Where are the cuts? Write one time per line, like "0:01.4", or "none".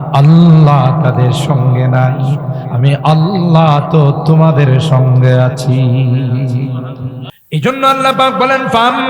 0:07.3